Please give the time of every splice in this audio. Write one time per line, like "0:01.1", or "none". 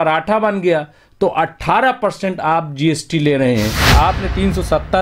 0:03.9